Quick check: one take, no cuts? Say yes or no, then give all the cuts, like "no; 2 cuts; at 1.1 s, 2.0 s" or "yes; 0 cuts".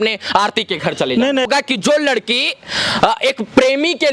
no; 1 cut; at 1.5 s